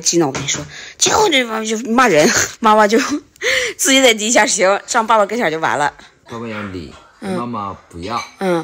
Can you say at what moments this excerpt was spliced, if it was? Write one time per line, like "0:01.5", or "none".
0:02.5
0:06.2